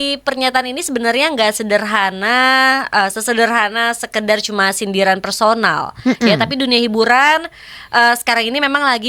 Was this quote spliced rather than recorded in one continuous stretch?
no; 0 cuts

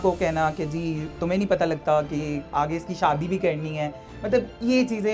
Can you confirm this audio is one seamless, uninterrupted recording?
yes; 0 cuts

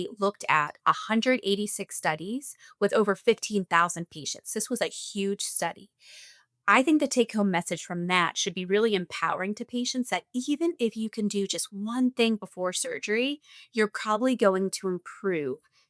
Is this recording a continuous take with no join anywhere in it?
yes; 0 cuts

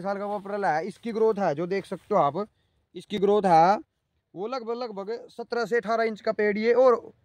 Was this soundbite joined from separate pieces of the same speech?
no; 0 cuts

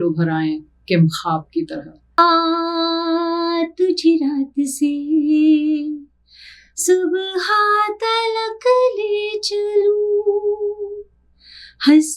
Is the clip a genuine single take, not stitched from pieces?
no; 1 cut; at 2.2 s

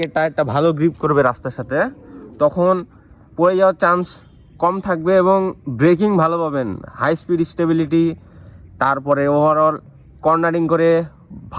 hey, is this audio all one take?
yes; 0 cuts

